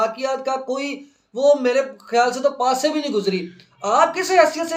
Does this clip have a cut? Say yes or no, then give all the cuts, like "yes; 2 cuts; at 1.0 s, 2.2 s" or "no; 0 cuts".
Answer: no; 0 cuts